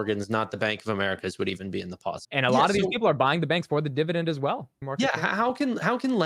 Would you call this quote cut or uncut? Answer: cut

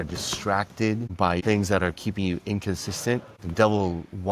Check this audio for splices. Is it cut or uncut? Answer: cut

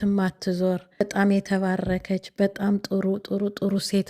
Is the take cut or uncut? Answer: cut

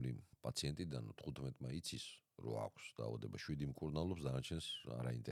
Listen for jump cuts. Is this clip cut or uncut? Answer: uncut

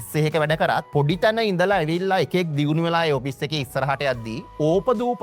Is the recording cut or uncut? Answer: uncut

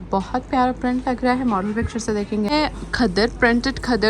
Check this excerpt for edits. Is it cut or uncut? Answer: cut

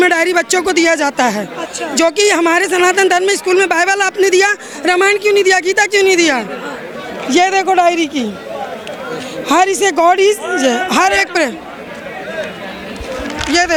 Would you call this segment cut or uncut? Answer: uncut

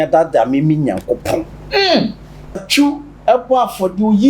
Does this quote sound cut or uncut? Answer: cut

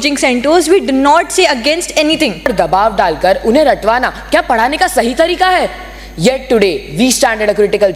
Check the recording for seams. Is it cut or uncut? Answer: cut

